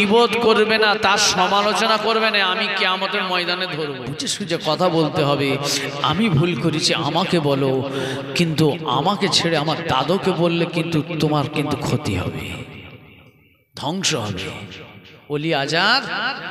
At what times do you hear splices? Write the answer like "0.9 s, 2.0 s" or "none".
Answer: 4.2 s